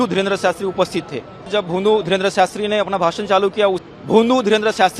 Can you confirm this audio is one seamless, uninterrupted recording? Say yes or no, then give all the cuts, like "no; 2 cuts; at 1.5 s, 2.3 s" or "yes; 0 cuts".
no; 2 cuts; at 1.3 s, 3.8 s